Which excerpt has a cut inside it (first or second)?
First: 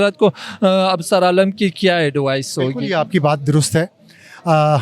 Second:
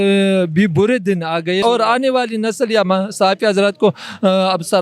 second